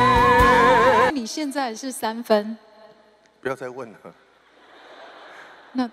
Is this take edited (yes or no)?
yes